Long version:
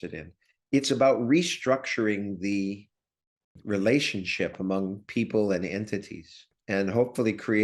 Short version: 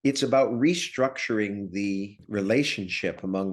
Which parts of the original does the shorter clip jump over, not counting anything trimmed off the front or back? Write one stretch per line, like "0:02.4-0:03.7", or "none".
0:02.9-0:03.5